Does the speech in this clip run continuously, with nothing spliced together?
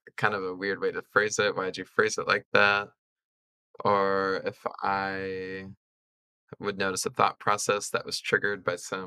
yes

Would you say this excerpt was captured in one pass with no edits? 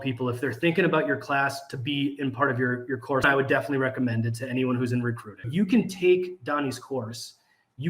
no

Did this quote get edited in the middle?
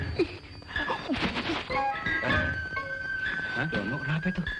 yes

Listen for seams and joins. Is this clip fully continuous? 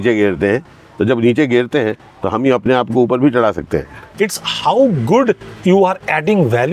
no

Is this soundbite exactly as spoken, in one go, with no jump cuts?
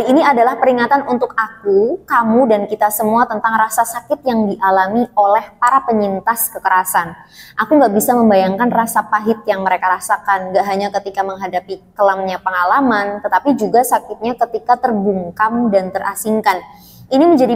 yes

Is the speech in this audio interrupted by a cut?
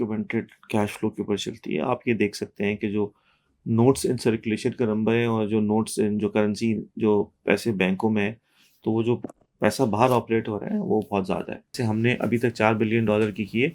yes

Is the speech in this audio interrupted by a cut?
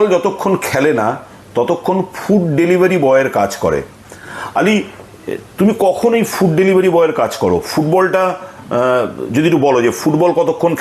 no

